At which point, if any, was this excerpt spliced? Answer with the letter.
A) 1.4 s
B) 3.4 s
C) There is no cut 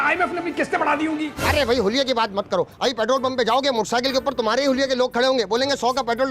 A